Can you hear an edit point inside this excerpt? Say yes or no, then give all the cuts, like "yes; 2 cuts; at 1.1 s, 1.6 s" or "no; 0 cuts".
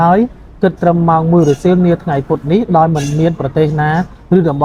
no; 0 cuts